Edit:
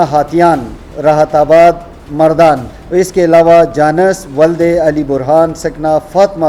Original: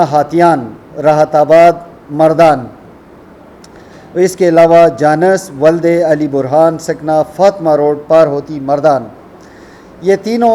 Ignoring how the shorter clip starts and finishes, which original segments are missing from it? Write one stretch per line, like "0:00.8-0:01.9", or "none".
0:02.7-0:04.0